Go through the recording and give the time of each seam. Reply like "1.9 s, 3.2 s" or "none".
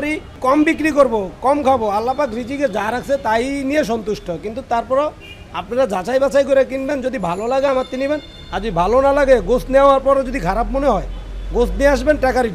none

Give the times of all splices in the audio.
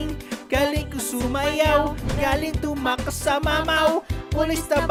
none

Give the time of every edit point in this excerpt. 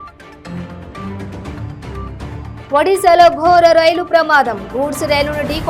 1.2 s

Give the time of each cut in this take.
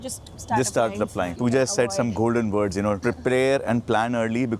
1.3 s, 3.0 s

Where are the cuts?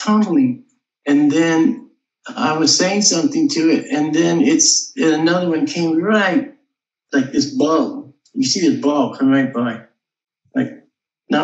none

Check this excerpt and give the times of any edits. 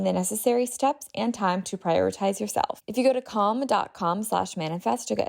2.8 s

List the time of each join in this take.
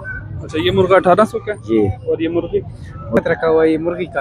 3.2 s

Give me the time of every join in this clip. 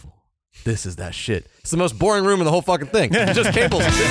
none

